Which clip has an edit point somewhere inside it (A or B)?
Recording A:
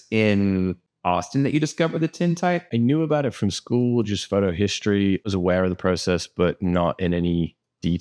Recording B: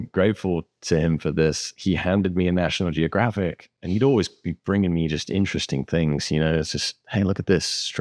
A